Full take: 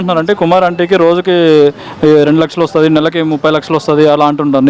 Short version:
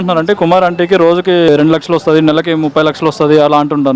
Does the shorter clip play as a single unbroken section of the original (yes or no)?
no